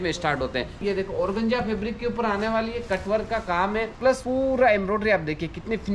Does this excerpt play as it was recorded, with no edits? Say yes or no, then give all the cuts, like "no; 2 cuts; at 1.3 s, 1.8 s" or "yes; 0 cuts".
no; 2 cuts; at 0.8 s, 4.1 s